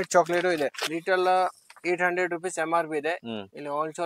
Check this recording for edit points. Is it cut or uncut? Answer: cut